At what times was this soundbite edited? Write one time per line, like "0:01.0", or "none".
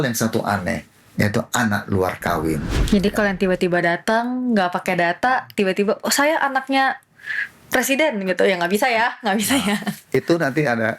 0:02.7